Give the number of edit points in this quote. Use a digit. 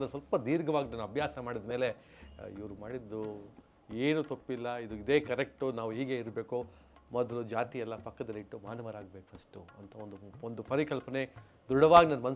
0